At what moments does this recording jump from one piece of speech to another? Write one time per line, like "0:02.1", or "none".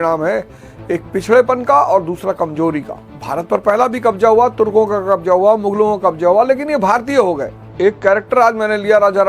0:03.1
0:07.6